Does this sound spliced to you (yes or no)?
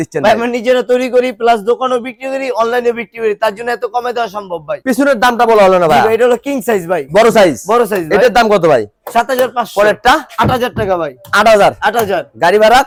no